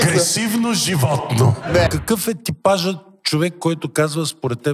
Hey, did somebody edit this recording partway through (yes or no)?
yes